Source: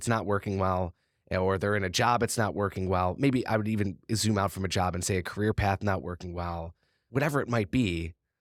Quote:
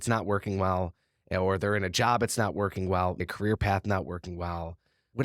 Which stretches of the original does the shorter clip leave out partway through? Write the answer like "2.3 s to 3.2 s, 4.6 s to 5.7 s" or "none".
3.2 s to 5.2 s